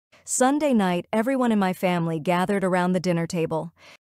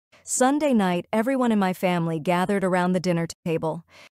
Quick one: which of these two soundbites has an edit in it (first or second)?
first